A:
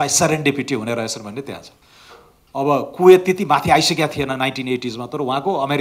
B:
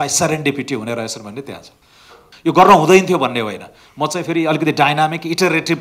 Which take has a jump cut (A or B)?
B